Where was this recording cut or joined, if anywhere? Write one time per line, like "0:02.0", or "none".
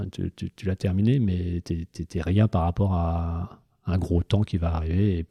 none